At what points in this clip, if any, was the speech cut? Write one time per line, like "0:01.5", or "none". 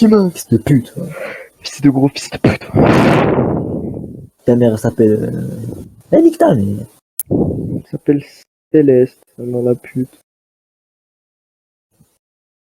none